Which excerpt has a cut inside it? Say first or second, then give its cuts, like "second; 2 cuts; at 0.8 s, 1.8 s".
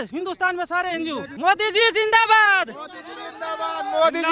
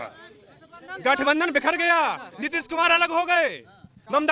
first; 1 cut; at 1.3 s